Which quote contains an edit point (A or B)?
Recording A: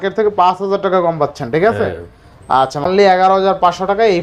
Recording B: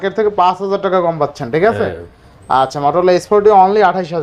A